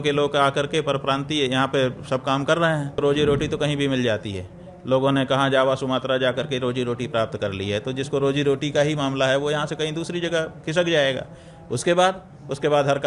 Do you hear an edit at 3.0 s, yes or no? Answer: yes